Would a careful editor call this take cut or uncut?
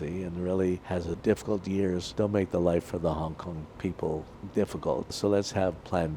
cut